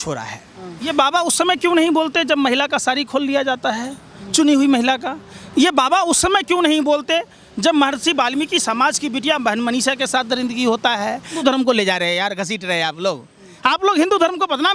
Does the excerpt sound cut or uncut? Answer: cut